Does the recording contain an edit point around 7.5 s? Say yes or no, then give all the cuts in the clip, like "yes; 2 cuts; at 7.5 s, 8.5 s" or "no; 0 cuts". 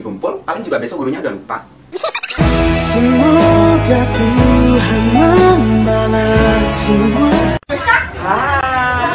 no; 1 cut; at 4.6 s